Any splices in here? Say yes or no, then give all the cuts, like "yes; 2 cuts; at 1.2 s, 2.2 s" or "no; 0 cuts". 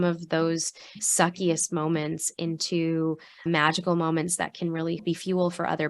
yes; 3 cuts; at 1.0 s, 3.4 s, 5.0 s